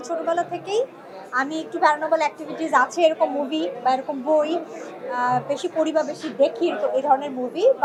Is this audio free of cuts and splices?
yes; 0 cuts

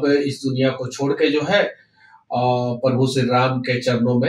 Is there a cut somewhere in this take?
no; 0 cuts

